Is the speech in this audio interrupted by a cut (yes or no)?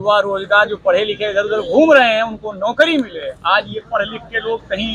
no